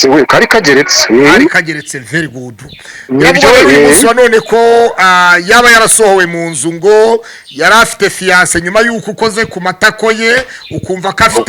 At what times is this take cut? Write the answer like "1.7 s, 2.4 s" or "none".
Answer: none